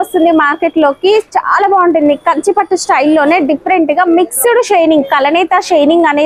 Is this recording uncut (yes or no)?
yes